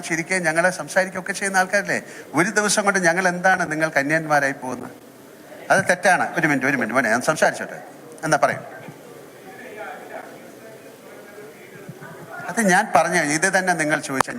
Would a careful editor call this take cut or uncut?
uncut